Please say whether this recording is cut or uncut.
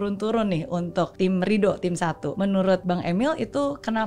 cut